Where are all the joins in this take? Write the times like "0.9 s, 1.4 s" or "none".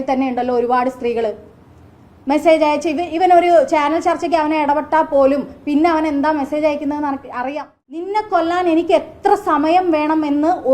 8.0 s